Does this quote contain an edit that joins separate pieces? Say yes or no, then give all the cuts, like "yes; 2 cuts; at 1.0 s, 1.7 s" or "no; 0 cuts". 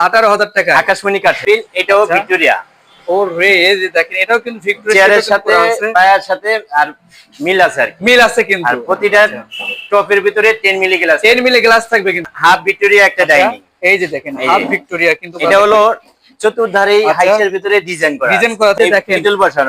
yes; 3 cuts; at 1.4 s, 12.3 s, 18.8 s